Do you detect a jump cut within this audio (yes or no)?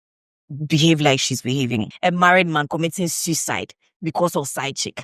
yes